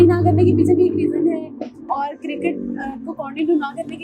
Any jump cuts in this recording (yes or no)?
no